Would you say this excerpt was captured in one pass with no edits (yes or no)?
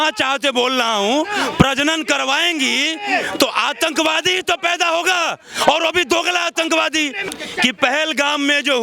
yes